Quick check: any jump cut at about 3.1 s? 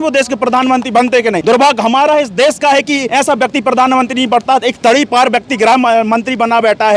yes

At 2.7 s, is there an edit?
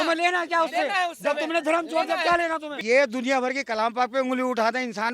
yes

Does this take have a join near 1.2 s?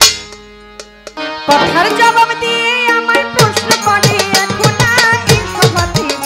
yes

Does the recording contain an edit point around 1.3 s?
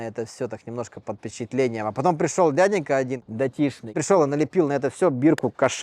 no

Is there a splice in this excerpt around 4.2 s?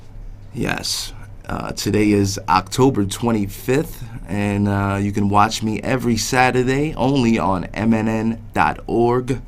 no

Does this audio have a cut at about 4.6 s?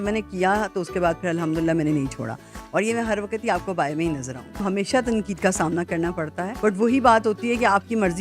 yes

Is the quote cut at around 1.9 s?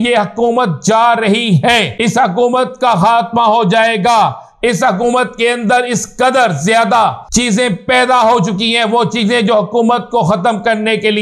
yes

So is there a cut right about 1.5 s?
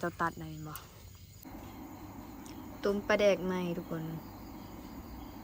yes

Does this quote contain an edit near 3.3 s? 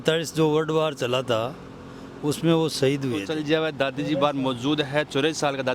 yes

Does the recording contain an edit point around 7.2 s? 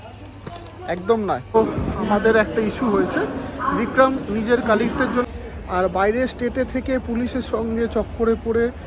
no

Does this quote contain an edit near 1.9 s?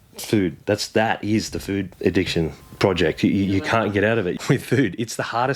yes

